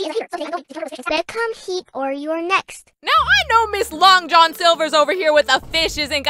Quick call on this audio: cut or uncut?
cut